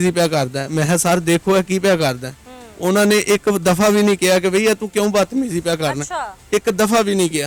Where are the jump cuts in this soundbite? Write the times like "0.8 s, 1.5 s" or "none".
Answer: none